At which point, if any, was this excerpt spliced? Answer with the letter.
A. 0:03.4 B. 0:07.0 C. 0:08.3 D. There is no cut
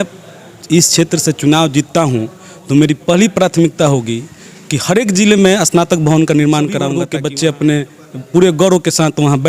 B